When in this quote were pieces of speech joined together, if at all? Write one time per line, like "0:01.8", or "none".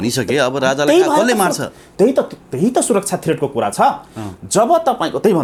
none